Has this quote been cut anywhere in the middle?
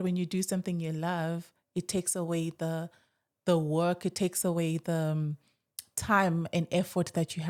no; 0 cuts

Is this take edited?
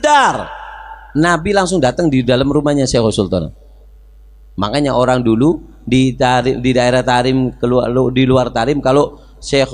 no; 0 cuts

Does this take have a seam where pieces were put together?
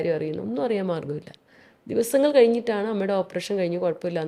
no; 0 cuts

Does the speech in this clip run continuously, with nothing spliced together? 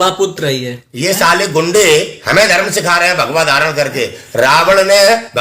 yes; 0 cuts

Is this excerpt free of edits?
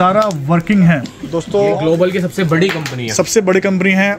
no; 1 cut; at 1.5 s

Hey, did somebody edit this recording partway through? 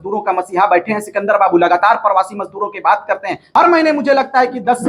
yes; 1 cut; at 3.6 s

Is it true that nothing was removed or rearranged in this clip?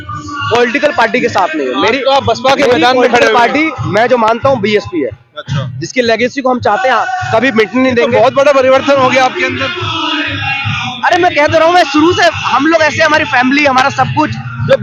yes; 0 cuts

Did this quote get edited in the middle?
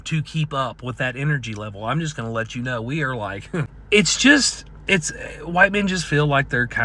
yes; 1 cut; at 3.8 s

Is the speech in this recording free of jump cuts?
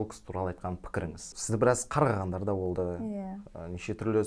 no; 1 cut; at 1.2 s

